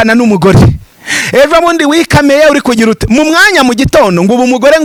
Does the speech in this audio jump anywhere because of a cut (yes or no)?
no